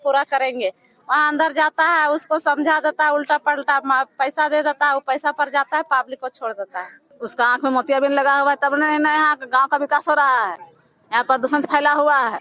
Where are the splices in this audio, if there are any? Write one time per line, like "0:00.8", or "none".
0:07.0